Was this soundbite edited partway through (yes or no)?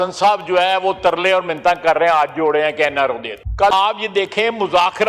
yes